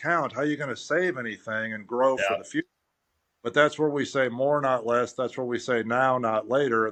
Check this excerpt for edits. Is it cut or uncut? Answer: uncut